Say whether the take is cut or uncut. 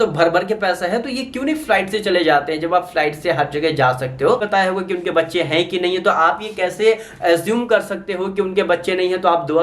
cut